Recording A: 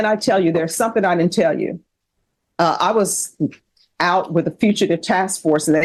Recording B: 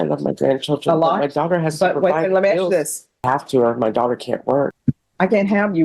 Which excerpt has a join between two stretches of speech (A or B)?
B